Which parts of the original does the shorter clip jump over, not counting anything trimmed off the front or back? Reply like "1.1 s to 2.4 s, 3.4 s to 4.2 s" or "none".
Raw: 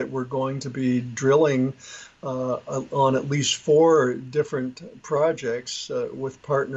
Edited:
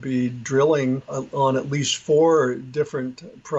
1.9 s to 2.7 s